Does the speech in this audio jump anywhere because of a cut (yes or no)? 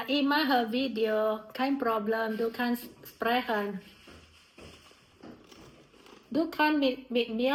no